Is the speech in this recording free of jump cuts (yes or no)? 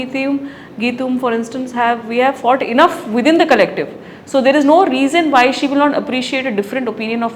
yes